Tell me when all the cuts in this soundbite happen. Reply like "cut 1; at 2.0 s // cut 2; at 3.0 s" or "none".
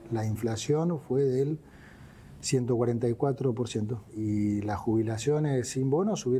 cut 1; at 4.1 s